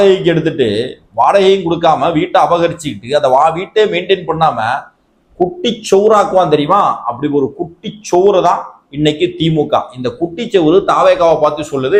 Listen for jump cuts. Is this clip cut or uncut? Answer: uncut